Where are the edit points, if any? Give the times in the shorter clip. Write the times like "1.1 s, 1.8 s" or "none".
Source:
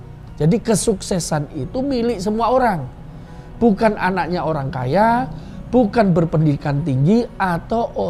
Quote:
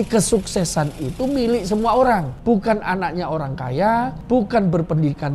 2.3 s, 4.2 s